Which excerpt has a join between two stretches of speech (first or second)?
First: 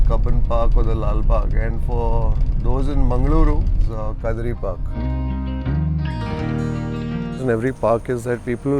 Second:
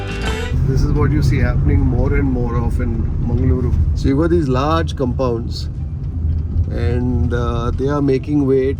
first